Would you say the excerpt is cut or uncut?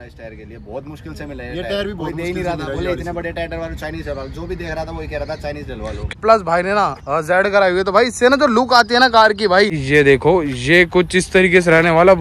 cut